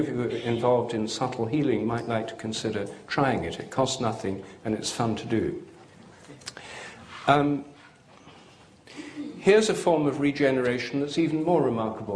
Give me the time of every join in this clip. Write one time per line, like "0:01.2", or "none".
0:04.5